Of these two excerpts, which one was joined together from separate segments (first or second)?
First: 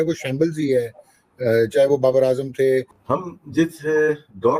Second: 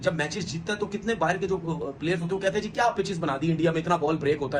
first